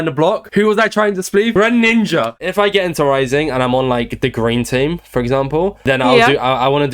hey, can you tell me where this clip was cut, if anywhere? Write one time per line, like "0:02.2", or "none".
0:02.3